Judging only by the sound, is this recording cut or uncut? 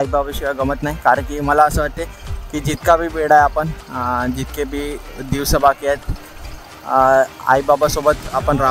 uncut